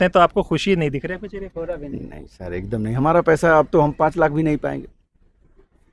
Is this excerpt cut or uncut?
uncut